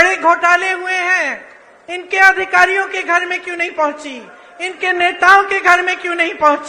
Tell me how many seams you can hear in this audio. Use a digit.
0